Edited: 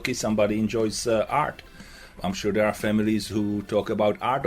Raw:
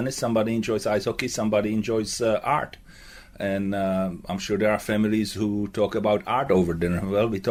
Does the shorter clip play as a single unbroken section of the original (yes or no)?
no